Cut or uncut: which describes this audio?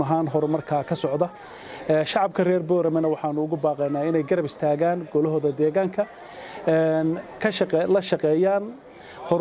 uncut